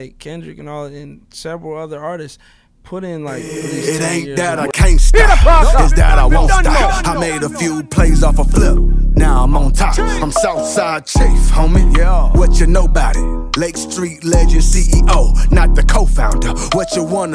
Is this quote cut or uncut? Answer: cut